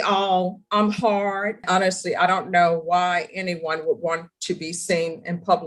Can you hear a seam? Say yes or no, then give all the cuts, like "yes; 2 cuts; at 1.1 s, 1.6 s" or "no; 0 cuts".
yes; 1 cut; at 1.6 s